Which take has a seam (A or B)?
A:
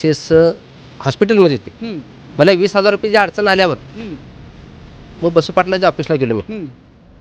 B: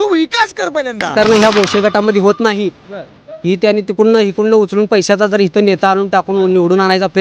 B